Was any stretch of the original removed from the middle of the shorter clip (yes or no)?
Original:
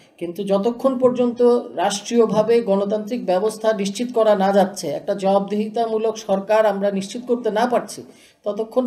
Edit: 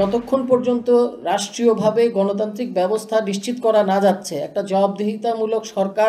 no